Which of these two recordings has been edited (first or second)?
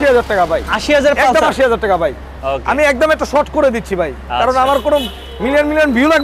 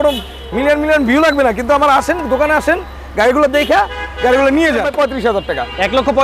second